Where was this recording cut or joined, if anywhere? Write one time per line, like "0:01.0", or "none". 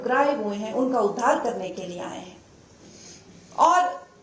none